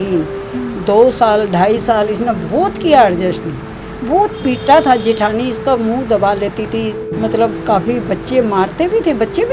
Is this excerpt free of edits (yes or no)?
yes